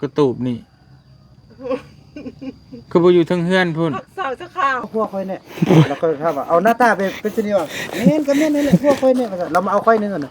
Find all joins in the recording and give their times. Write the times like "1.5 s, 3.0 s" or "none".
4.9 s